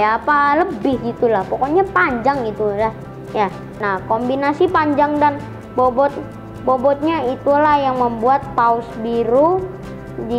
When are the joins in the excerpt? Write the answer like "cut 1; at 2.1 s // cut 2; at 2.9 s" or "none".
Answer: cut 1; at 3.7 s